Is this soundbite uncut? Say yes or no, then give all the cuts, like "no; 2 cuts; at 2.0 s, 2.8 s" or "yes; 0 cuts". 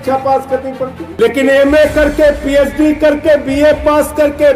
no; 1 cut; at 1.0 s